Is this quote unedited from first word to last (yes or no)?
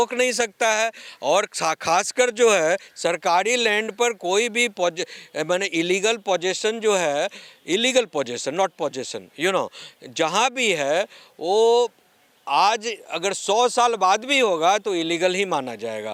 yes